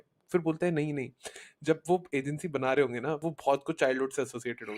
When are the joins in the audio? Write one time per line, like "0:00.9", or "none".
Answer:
0:03.2